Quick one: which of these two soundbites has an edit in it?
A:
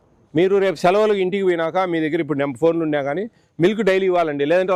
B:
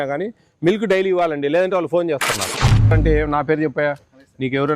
B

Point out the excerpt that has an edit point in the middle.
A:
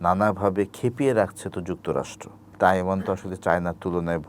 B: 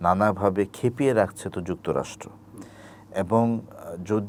A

